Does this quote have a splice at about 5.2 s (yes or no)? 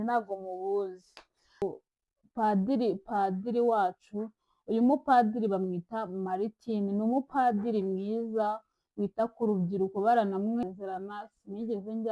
no